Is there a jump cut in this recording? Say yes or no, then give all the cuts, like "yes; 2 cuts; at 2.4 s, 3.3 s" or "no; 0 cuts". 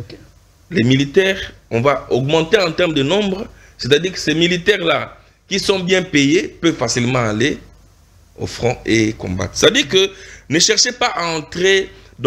no; 0 cuts